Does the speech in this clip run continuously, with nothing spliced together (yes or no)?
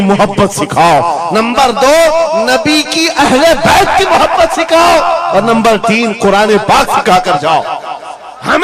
yes